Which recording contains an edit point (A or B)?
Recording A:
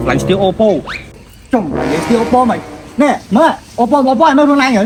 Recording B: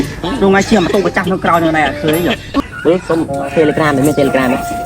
B